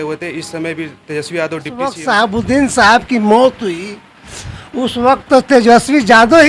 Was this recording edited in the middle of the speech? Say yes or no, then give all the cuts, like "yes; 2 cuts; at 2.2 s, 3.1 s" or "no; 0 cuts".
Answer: yes; 1 cut; at 2.0 s